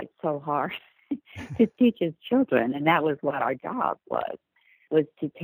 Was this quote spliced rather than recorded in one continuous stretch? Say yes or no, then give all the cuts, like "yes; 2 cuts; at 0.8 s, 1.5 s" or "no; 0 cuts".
no; 0 cuts